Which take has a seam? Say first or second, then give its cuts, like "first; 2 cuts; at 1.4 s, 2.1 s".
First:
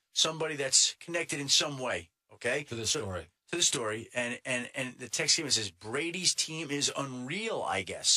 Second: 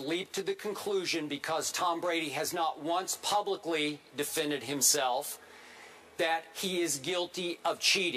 second; 1 cut; at 6.5 s